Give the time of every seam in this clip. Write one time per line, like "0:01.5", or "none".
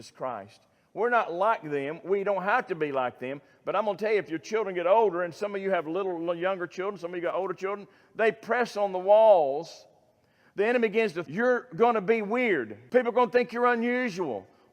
0:11.2
0:12.7

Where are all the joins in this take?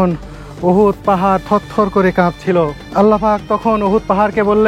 0:02.8

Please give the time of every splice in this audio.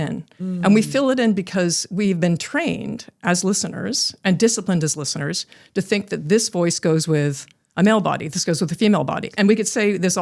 0:09.3

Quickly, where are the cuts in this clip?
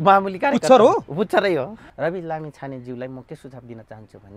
0:01.8

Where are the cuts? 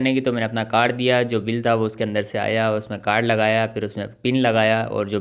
none

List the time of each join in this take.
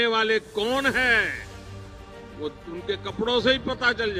none

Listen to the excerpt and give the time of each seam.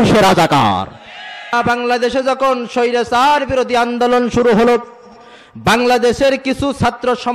0:01.5

